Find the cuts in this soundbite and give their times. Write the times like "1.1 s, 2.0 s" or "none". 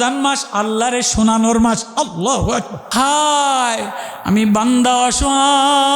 2.8 s